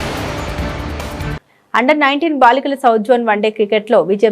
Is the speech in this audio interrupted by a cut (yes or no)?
yes